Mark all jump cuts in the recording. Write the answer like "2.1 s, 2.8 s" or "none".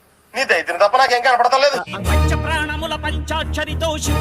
2.0 s

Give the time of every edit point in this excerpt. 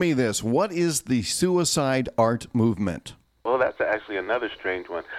3.4 s

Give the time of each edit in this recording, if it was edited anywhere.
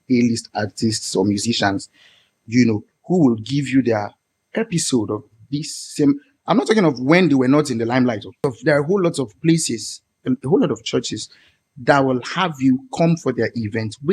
8.5 s

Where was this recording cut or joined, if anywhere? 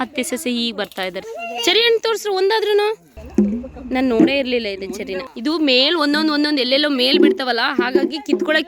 1.3 s, 3.1 s, 5.3 s

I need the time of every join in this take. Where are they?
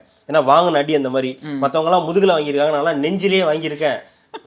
none

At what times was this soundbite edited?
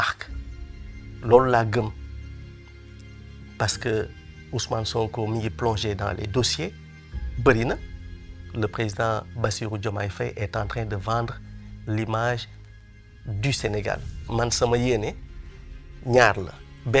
14.1 s

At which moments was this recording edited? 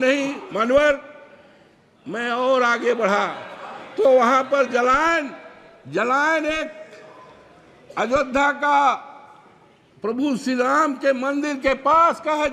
none

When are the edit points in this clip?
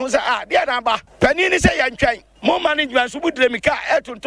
1.1 s, 2.3 s

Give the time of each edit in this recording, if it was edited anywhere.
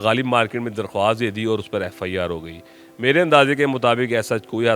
none

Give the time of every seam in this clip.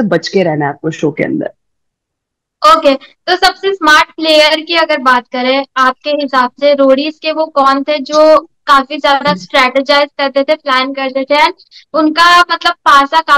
none

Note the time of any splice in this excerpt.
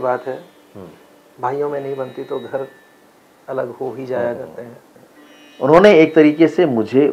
4.8 s

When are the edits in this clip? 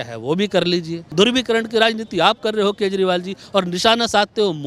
1.0 s

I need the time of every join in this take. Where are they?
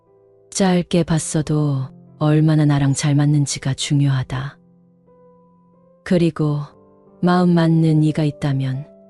none

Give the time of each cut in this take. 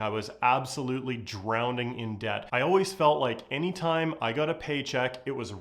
2.4 s

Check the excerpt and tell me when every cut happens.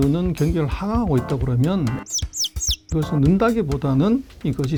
none

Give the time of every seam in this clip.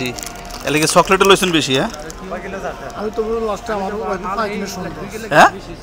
none

